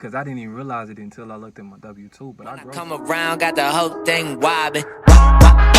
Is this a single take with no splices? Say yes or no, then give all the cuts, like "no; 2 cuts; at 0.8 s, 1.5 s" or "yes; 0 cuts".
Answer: no; 1 cut; at 2.7 s